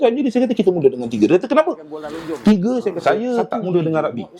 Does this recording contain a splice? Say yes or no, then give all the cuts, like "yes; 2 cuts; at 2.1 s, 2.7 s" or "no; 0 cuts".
yes; 1 cut; at 3.0 s